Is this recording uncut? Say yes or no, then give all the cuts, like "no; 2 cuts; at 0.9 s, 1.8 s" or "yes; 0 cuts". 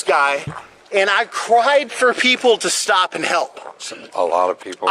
yes; 0 cuts